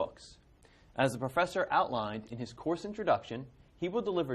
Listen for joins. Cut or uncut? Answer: cut